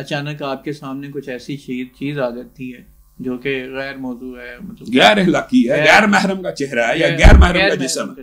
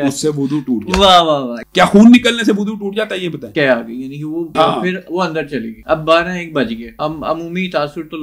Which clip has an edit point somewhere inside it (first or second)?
second